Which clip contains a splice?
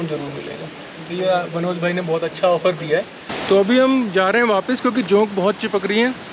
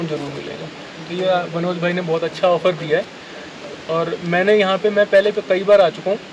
first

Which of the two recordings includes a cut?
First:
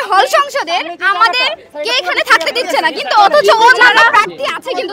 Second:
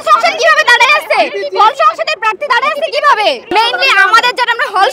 second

